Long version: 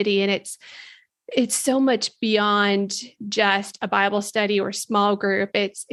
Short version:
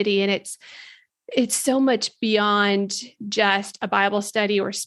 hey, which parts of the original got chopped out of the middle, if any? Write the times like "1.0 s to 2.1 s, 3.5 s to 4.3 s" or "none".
none